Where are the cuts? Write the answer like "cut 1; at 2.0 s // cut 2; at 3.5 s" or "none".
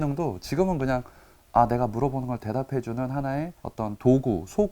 cut 1; at 3.6 s